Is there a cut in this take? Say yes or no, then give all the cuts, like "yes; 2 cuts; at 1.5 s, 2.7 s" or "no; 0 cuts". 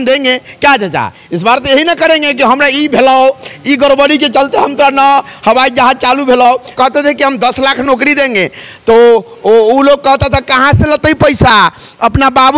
yes; 1 cut; at 6.7 s